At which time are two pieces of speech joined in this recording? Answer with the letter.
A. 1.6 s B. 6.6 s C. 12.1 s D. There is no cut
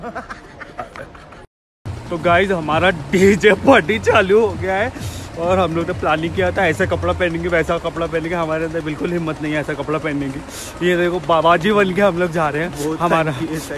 A